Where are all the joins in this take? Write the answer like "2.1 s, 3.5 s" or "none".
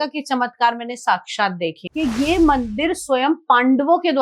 1.8 s